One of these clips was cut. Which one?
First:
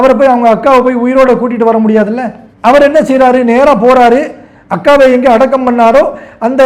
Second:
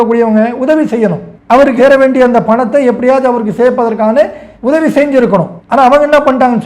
second; 1 cut; at 5.6 s

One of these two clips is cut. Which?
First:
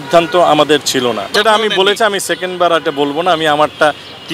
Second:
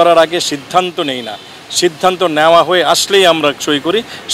first; 1 cut; at 1.3 s

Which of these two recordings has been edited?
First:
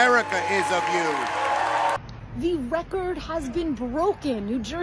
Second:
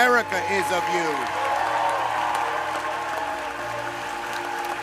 first; 1 cut; at 2.0 s

